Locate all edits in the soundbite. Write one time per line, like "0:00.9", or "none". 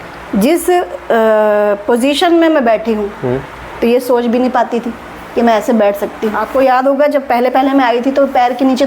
0:06.4

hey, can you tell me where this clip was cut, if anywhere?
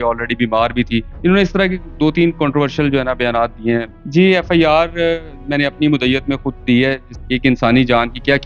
0:01.1
0:04.0
0:07.1

